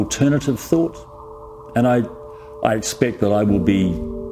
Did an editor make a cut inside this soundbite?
no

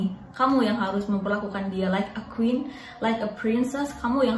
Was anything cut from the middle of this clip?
no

